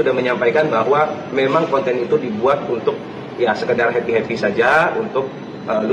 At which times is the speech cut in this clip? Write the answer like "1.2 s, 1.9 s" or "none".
none